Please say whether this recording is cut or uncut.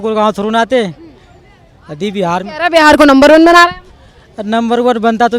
uncut